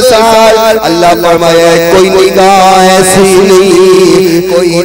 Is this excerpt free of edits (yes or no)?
yes